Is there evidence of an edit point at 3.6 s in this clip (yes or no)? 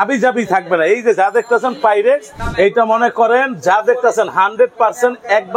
no